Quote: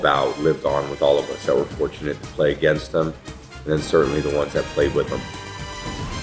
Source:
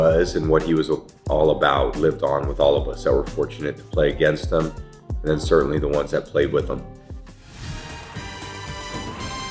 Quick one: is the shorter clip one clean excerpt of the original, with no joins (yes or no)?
no